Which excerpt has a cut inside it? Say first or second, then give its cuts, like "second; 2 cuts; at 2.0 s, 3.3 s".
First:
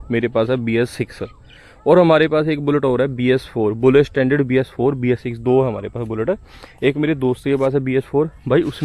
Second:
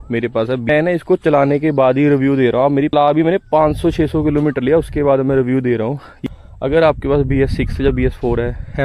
second; 3 cuts; at 0.7 s, 2.9 s, 6.1 s